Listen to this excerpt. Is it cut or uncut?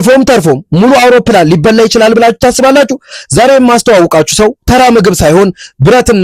uncut